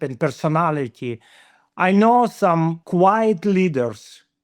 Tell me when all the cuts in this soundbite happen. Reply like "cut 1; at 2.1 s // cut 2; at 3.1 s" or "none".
cut 1; at 2.8 s